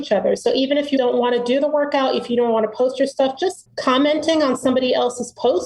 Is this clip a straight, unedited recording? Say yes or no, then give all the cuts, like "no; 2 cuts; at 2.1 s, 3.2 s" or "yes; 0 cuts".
no; 2 cuts; at 1.0 s, 3.7 s